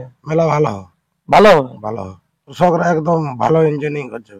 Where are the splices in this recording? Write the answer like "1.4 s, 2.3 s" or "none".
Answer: 2.5 s